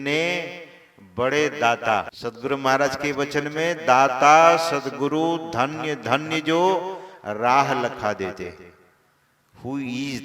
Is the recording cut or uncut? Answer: cut